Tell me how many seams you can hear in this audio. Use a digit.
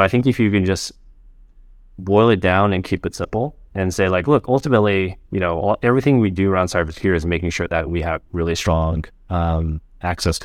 0